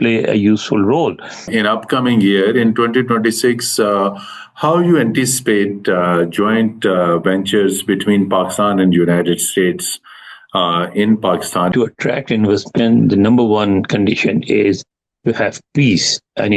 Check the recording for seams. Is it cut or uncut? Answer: cut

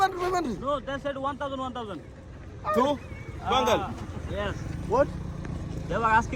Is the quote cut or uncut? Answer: uncut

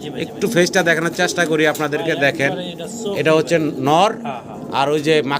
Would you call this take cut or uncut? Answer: uncut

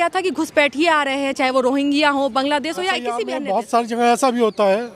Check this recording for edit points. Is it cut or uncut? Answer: cut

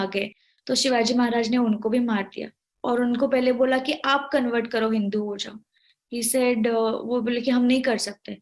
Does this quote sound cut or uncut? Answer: uncut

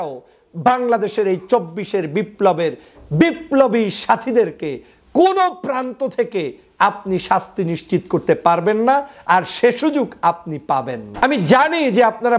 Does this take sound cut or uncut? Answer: cut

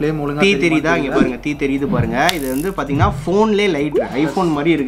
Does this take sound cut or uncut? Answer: uncut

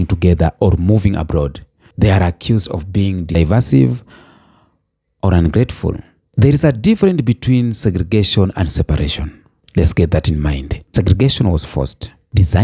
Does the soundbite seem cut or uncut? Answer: cut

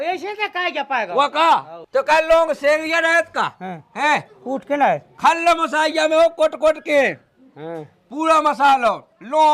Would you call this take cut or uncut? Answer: cut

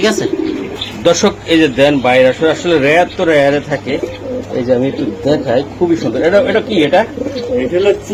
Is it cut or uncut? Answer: uncut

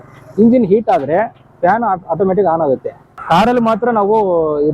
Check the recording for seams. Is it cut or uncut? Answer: cut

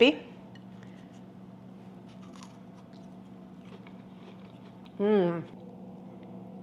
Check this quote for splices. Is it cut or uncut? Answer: cut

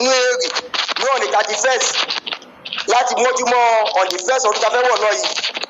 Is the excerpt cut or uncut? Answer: uncut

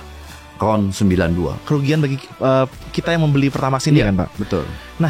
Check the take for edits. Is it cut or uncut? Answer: cut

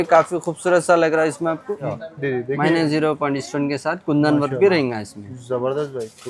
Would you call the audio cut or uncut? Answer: cut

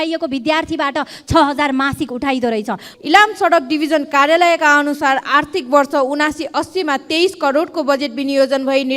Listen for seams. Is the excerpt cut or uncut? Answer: cut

